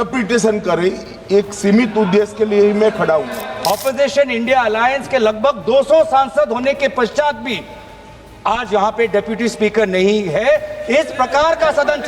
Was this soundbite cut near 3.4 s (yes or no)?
yes